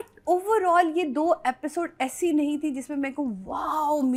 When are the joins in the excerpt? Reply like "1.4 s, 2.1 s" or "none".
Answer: none